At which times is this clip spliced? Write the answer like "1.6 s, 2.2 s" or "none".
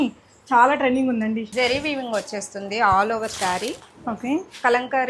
1.5 s